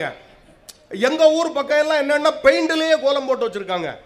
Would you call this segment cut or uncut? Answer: uncut